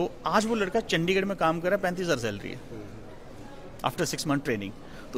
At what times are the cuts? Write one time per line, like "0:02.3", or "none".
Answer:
none

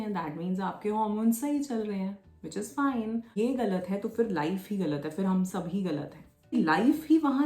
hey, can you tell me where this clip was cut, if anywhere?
0:03.3
0:06.5

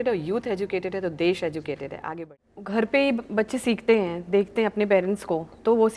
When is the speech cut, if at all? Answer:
0:02.2

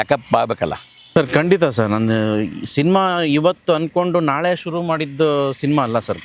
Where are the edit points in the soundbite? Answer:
0:01.1

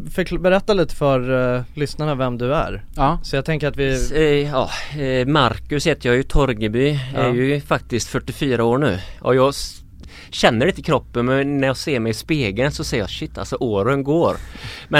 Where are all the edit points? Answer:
0:04.1

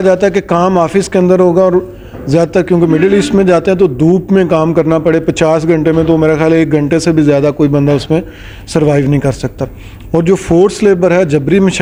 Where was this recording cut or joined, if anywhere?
none

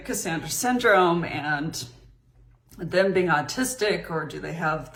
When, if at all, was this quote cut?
none

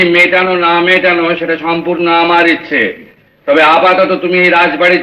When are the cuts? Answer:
none

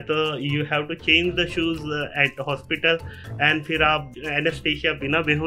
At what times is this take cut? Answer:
0:04.1

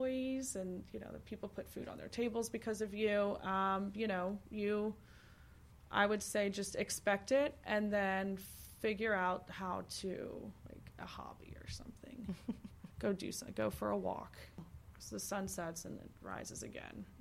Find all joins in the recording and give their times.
0:14.6

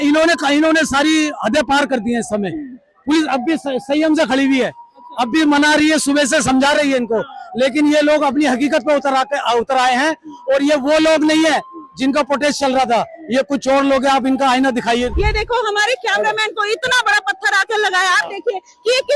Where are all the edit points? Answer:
0:15.1

